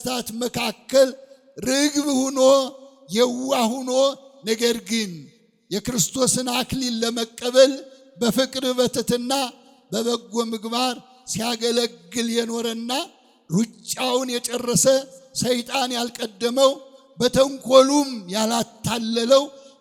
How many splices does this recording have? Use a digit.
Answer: 0